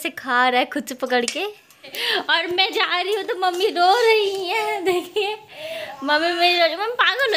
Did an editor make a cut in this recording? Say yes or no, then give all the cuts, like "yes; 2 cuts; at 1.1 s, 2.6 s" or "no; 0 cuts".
yes; 1 cut; at 2.0 s